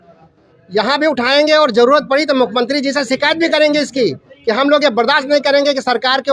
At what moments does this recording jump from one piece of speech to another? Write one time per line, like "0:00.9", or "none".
none